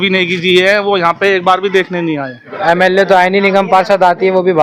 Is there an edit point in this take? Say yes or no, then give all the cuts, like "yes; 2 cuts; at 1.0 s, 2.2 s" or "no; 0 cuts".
yes; 1 cut; at 2.5 s